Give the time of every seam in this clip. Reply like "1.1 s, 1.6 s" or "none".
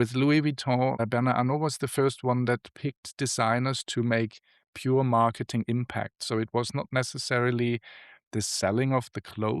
1.0 s